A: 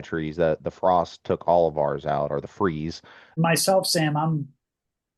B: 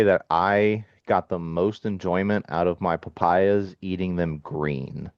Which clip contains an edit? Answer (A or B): A